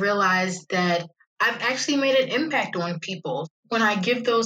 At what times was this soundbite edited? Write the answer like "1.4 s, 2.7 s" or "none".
1.1 s, 3.6 s